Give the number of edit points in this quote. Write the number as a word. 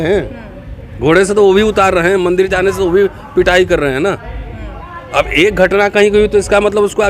zero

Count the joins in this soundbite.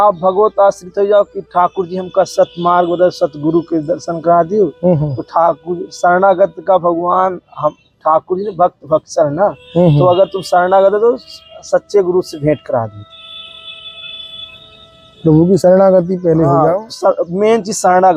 zero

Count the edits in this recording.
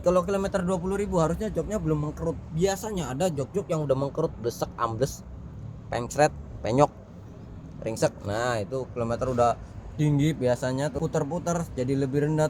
one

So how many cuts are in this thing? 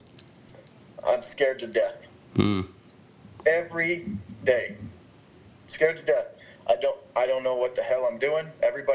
zero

